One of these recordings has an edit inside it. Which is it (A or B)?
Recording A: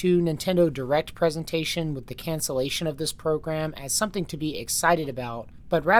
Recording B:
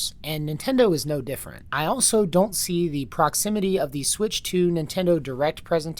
B